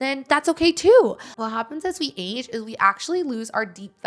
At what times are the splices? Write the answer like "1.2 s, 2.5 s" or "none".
1.3 s